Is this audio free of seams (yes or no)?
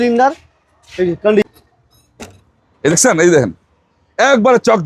no